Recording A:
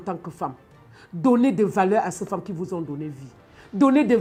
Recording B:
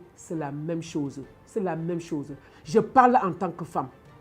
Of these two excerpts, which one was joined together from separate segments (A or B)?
B